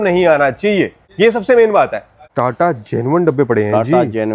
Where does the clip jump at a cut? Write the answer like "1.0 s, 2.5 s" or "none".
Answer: 1.0 s, 2.2 s